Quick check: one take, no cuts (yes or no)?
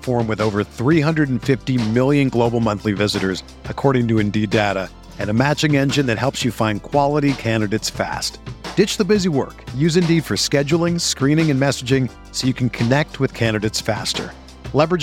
yes